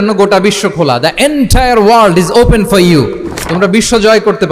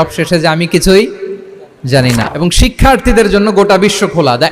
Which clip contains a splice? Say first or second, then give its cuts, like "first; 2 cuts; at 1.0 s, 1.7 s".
second; 1 cut; at 2.2 s